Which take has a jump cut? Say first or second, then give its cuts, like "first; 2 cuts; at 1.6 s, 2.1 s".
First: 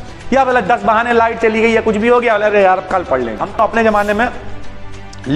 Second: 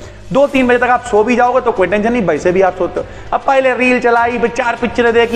first; 1 cut; at 3.6 s